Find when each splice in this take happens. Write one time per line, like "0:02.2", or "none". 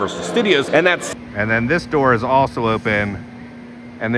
0:01.0